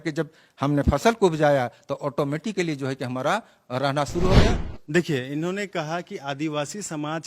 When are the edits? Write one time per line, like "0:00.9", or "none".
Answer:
0:04.4